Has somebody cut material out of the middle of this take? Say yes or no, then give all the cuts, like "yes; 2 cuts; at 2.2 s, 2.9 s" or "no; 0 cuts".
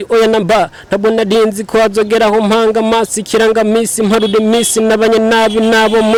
no; 0 cuts